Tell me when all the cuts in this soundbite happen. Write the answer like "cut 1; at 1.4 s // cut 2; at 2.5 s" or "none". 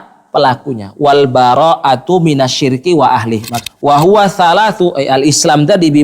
cut 1; at 3.5 s